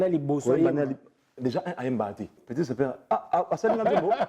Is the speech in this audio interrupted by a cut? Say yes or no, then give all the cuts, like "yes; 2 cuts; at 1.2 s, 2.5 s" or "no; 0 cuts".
yes; 1 cut; at 2.4 s